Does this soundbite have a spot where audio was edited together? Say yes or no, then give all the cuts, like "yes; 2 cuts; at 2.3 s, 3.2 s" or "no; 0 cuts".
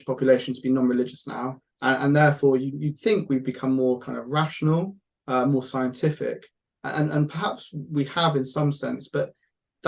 no; 0 cuts